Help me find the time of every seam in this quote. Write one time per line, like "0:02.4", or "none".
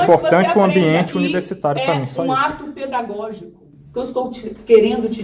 0:01.1